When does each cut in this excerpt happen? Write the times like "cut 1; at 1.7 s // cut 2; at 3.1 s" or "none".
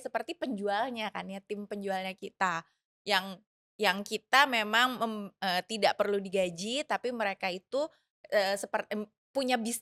none